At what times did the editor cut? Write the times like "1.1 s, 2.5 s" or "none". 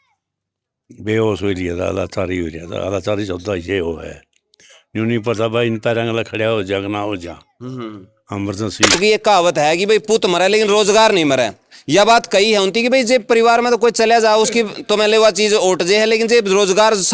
9.0 s